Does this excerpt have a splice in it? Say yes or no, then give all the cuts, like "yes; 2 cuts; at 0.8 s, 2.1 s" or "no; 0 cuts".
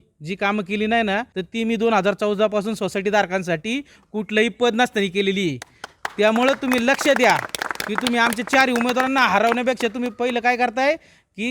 yes; 1 cut; at 1.4 s